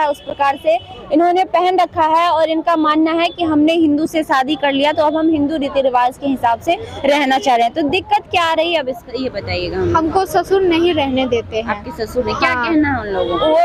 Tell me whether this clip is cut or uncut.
uncut